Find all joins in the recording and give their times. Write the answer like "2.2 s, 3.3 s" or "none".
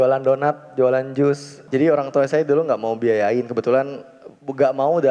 1.5 s